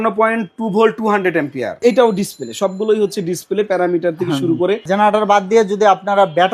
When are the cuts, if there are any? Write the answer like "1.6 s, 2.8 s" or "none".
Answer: 1.8 s, 4.8 s